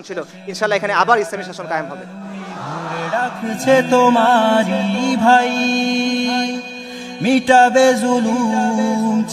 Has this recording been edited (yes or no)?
yes